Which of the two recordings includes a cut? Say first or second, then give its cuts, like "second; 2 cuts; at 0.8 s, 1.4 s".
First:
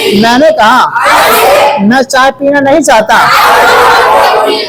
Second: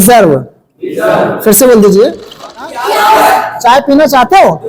second; 1 cut; at 2.7 s